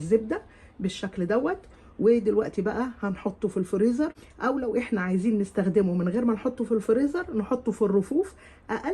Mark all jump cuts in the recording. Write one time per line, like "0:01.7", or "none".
0:04.3